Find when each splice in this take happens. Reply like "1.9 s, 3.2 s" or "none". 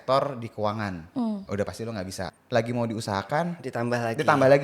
2.3 s